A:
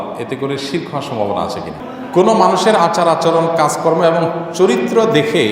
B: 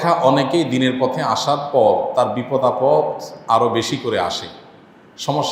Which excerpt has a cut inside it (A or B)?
A